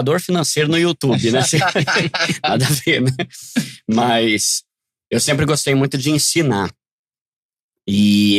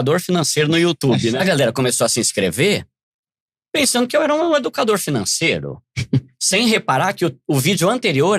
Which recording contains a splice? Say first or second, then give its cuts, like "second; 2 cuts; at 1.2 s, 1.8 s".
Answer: second; 1 cut; at 1.3 s